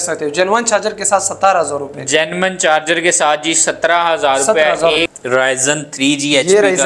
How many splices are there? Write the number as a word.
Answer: one